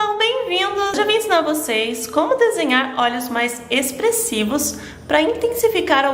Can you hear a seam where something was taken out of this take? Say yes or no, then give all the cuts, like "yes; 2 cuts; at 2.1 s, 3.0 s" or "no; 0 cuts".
yes; 1 cut; at 1.0 s